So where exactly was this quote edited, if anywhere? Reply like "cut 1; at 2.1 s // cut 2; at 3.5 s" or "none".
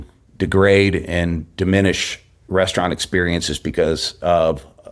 none